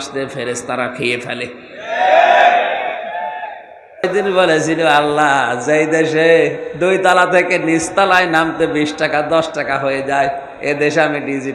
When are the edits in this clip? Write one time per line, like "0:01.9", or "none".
0:04.1